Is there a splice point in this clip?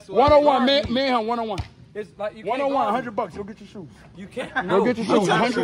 no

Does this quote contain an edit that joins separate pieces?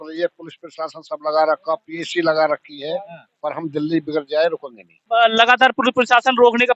yes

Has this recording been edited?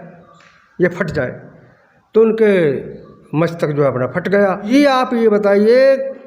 yes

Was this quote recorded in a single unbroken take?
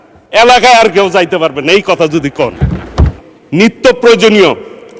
no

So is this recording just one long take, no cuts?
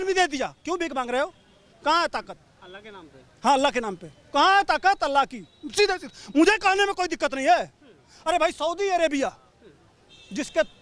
yes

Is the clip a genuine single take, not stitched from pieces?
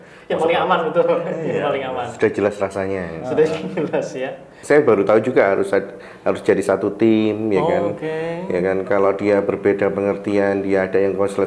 no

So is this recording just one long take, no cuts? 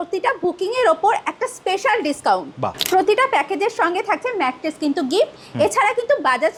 yes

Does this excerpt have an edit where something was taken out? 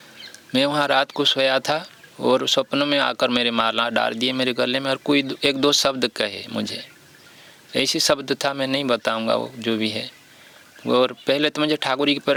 no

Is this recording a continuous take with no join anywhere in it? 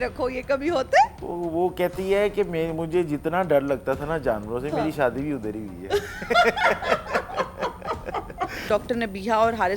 no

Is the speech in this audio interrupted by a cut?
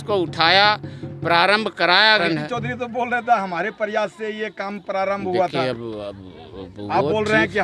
yes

